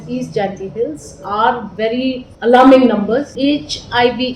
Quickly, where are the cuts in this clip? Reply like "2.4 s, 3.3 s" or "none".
2.3 s, 3.3 s